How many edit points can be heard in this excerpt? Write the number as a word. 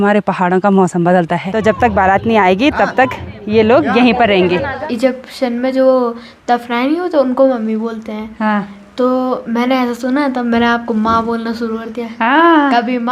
two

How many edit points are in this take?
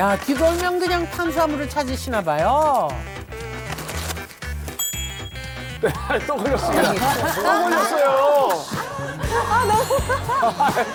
zero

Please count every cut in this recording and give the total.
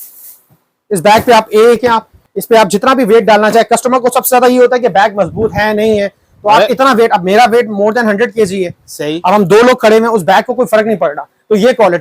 one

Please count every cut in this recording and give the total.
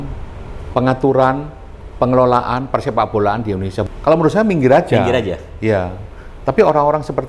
one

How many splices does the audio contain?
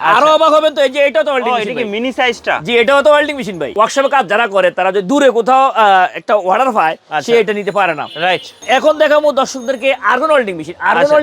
two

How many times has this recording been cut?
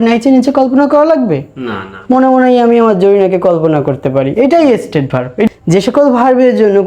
one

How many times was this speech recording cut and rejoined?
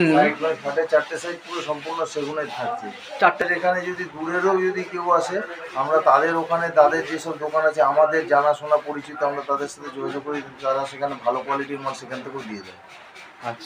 one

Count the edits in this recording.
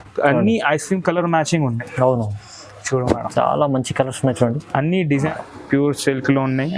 one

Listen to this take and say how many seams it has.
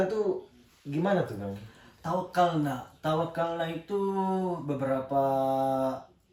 zero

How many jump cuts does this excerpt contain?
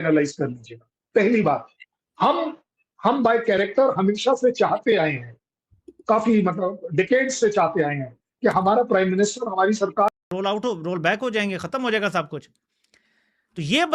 one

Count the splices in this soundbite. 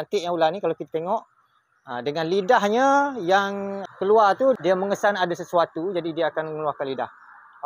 two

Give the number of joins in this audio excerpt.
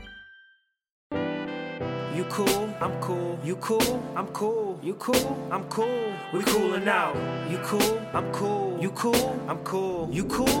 one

